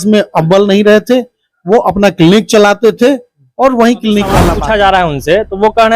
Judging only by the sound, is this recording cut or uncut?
cut